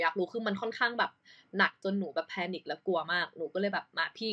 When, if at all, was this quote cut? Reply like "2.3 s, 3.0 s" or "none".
none